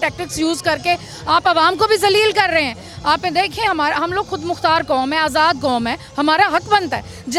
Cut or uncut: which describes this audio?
uncut